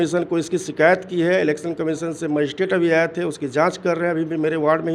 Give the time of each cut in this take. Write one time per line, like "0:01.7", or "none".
none